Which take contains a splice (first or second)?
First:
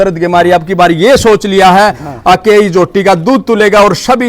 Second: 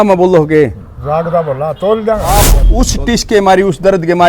second